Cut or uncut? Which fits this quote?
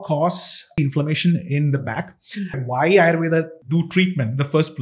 cut